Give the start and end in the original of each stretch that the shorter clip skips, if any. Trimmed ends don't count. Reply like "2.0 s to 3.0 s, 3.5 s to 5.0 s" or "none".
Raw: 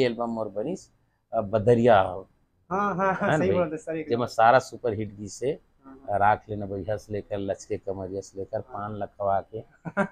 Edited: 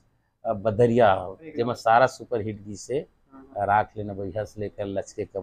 2.3 s to 3.9 s